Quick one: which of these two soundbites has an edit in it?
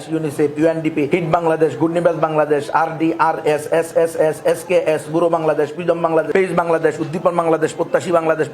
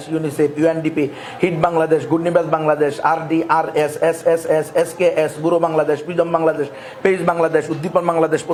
first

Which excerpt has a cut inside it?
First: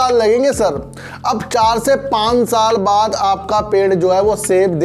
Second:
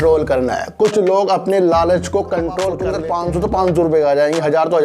second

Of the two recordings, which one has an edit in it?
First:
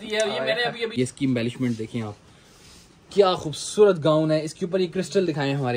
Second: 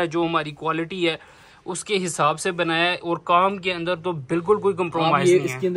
first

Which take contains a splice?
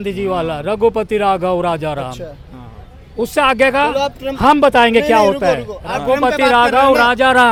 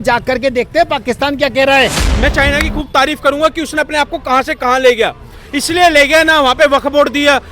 second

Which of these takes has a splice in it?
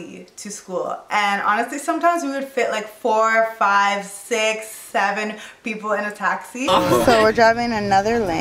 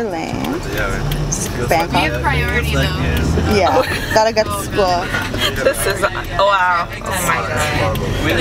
first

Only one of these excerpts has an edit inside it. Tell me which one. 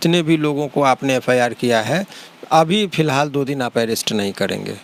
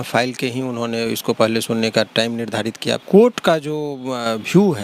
second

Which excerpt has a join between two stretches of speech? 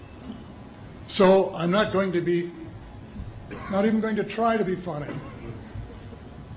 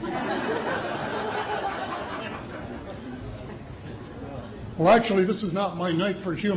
second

